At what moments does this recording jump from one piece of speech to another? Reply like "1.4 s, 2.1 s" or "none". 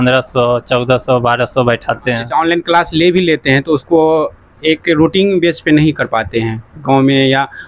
2.2 s

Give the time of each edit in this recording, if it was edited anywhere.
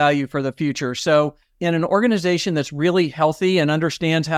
none

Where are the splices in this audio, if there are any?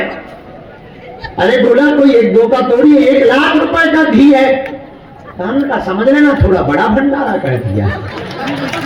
none

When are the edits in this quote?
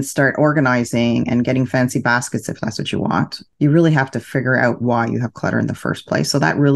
none

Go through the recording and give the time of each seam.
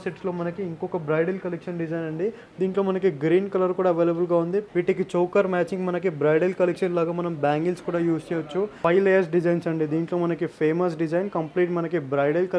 4.7 s, 8.7 s

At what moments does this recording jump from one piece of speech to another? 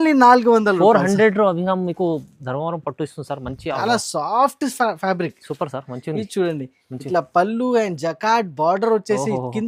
3.8 s

